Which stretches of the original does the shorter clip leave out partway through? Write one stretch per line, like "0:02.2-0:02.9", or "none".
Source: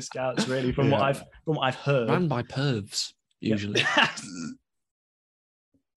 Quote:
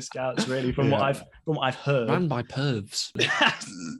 0:03.1-0:03.7